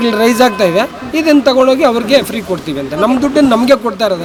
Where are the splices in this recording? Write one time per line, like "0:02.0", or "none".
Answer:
none